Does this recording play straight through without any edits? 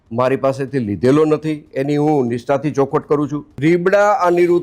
no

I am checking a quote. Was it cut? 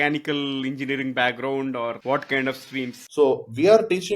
yes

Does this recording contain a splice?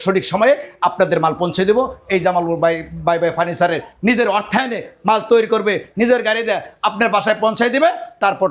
no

